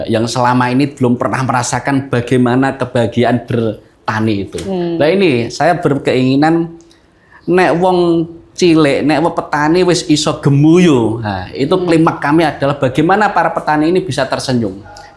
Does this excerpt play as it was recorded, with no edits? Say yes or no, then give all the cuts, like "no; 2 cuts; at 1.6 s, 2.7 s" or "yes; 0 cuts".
yes; 0 cuts